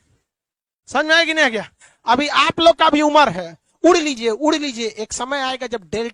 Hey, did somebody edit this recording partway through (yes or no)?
no